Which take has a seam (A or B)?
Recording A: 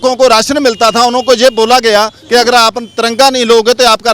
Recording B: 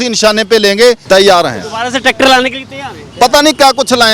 B